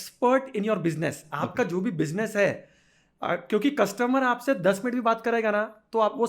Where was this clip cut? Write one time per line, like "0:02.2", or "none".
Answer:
none

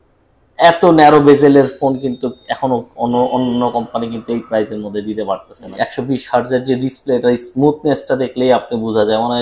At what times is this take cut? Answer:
0:05.7

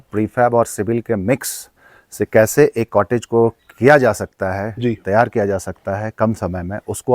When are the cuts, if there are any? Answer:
0:02.5

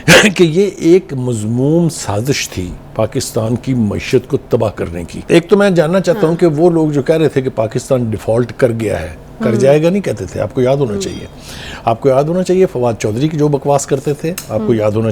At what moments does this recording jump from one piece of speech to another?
0:05.2

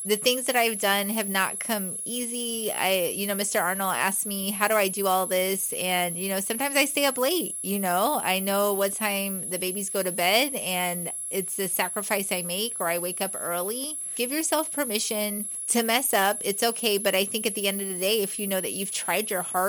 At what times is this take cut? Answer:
0:14.1
0:15.5

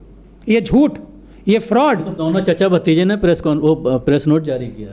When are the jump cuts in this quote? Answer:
0:02.1

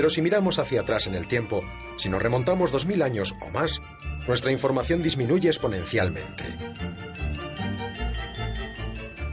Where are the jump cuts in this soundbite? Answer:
0:05.8

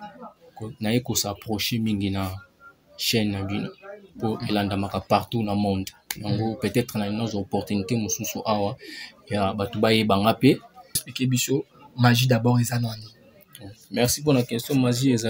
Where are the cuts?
0:11.1

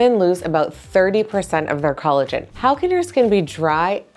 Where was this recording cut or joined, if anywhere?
0:02.4

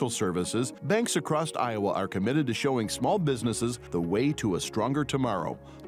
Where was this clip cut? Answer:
none

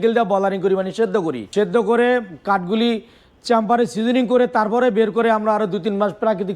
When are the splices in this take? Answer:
0:01.4

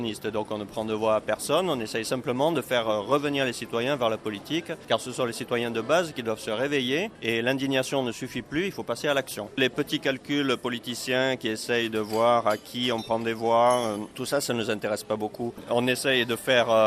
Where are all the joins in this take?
0:04.8
0:07.1
0:09.6
0:14.2
0:15.6

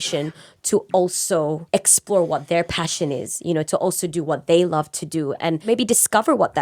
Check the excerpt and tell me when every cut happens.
0:01.6
0:05.6

